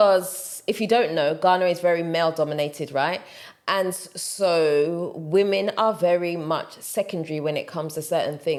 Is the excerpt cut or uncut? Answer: uncut